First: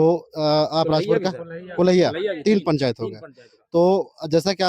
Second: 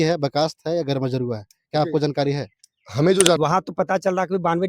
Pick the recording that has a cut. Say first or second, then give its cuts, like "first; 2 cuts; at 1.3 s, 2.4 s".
second; 1 cut; at 3.4 s